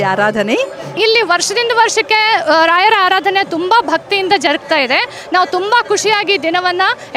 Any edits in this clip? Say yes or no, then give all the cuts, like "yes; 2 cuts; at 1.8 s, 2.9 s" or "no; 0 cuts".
yes; 1 cut; at 0.9 s